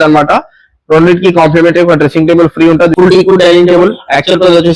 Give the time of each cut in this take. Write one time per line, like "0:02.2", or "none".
0:02.9